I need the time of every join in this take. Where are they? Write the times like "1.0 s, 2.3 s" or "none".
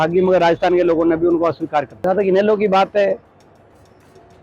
1.9 s